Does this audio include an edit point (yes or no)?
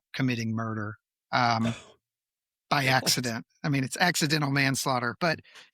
no